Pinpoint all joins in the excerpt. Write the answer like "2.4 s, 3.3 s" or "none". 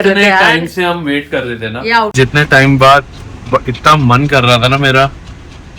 2.1 s